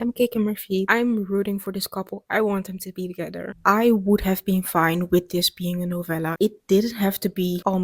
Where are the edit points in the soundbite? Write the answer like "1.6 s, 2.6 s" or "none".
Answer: 0.8 s, 3.4 s, 6.3 s